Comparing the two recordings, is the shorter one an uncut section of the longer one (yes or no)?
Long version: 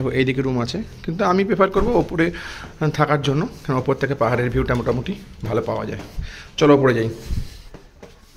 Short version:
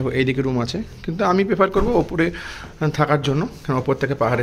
yes